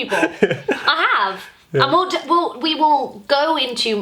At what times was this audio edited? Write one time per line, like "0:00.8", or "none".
none